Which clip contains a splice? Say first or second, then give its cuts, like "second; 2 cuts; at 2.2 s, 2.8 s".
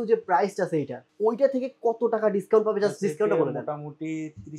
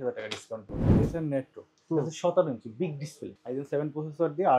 second; 2 cuts; at 0.9 s, 3.3 s